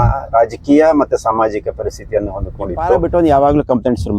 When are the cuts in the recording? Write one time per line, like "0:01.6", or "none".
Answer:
0:03.0